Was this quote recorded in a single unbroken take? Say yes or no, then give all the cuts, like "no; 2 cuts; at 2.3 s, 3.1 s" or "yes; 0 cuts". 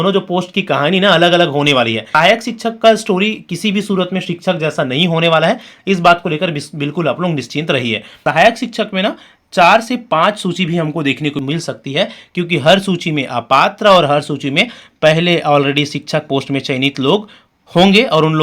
no; 3 cuts; at 2.0 s, 8.2 s, 11.4 s